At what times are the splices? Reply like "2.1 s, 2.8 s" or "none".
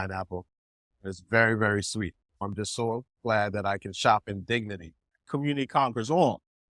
2.3 s, 5.3 s